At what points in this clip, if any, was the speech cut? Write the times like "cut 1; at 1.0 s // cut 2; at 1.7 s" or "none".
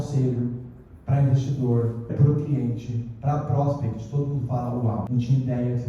cut 1; at 2.1 s // cut 2; at 5.1 s